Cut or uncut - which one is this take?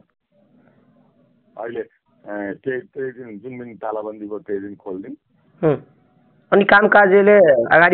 uncut